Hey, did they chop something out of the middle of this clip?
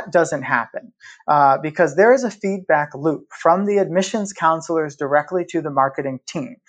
no; 0 cuts

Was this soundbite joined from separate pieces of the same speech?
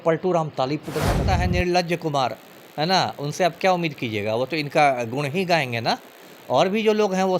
yes; 1 cut; at 1.2 s

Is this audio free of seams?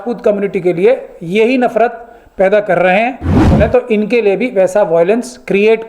no; 1 cut; at 3.5 s

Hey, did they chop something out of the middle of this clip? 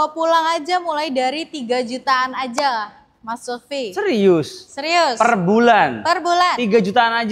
no; 0 cuts

